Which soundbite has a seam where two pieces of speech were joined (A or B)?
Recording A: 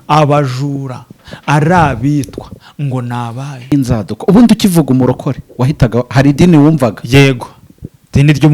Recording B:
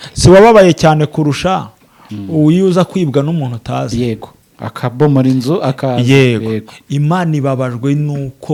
A